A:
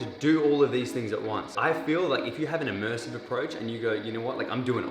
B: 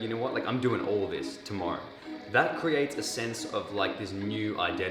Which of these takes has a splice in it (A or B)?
A